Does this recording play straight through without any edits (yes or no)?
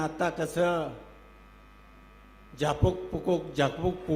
yes